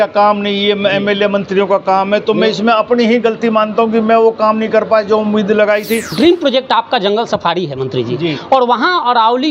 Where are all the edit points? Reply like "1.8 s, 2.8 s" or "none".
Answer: 6.1 s